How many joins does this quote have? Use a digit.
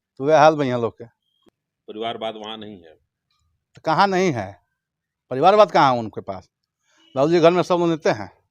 1